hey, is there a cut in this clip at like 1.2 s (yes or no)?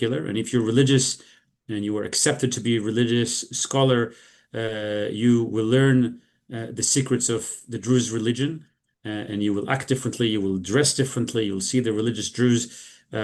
no